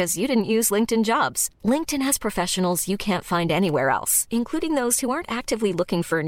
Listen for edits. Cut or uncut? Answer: uncut